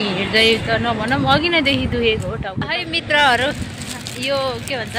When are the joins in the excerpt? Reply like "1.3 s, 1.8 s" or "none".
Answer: 2.6 s

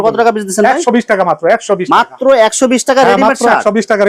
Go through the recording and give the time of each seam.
none

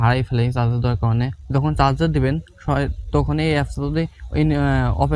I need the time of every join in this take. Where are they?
1.4 s

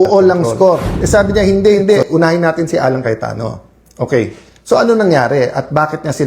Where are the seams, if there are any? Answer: 0.9 s

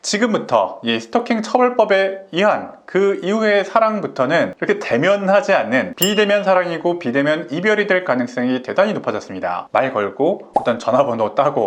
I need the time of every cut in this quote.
9.6 s

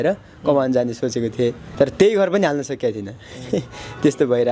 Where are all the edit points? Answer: 1.6 s

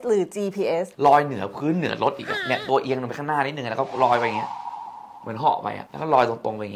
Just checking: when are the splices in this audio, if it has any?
0.9 s

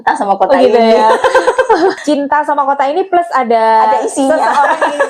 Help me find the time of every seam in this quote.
2.0 s

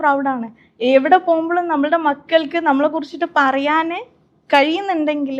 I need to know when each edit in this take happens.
none

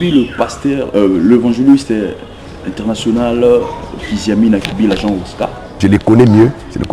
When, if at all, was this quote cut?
5.7 s

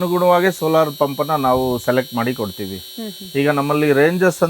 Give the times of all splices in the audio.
none

